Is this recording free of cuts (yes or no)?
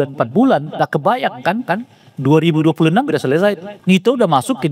no